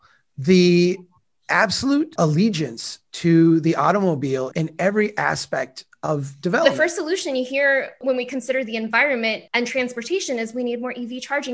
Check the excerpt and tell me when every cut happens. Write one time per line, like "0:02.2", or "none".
0:02.1
0:04.5
0:06.6
0:08.0
0:09.4